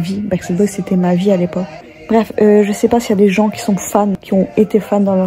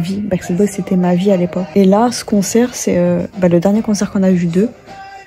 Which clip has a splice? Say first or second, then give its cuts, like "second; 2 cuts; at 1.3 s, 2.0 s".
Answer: first; 2 cuts; at 1.7 s, 4.2 s